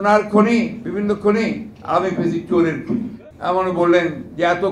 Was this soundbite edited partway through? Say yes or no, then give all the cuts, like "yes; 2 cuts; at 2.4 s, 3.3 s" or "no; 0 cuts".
yes; 1 cut; at 3.2 s